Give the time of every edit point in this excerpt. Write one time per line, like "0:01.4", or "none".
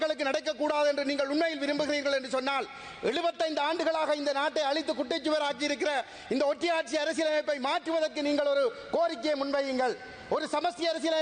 none